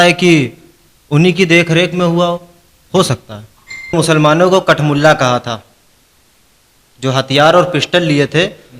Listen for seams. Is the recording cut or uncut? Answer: cut